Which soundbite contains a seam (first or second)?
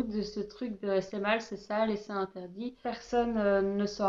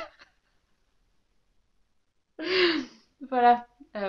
first